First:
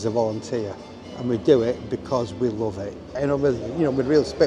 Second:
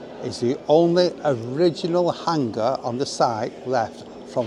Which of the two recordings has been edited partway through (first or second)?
first